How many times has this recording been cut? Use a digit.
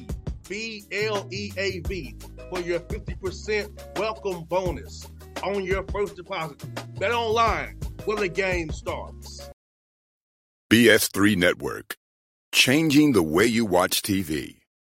1